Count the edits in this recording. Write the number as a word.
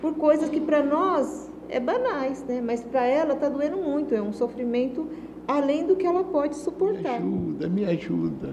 one